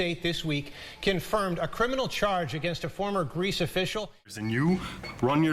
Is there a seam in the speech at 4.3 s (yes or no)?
yes